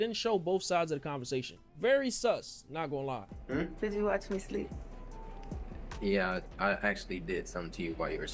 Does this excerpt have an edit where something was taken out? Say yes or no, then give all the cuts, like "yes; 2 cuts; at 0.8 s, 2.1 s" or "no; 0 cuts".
yes; 1 cut; at 3.3 s